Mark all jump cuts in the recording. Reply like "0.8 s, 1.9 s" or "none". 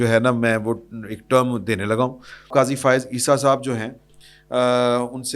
2.5 s